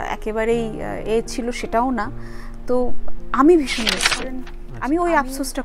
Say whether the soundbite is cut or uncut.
cut